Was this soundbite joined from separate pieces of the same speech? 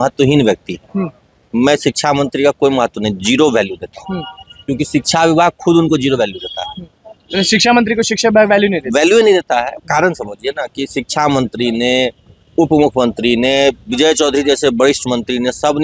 no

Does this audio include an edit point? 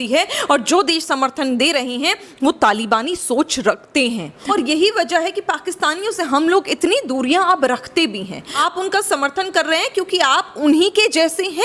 yes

